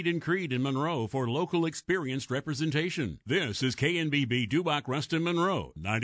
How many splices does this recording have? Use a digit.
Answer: 0